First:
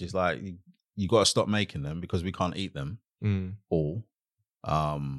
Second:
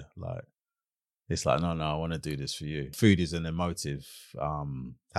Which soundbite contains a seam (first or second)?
second